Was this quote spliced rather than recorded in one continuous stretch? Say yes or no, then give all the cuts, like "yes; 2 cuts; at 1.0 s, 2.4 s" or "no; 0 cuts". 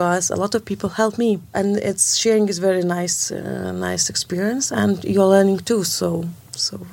yes; 1 cut; at 1.5 s